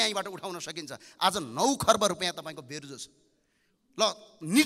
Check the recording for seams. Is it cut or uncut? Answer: uncut